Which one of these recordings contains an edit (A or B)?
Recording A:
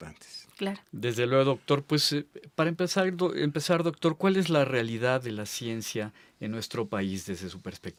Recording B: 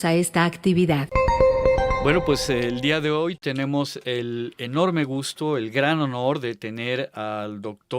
B